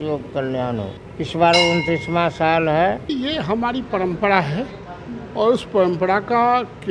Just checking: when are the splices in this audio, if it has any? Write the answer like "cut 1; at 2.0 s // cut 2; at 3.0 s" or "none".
cut 1; at 1.0 s // cut 2; at 3.1 s